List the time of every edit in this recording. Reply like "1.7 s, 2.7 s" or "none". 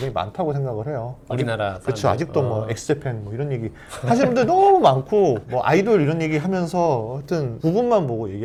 none